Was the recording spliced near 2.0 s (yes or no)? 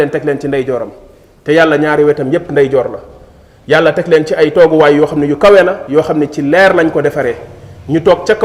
no